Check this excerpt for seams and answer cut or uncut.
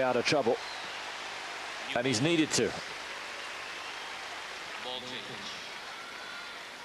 cut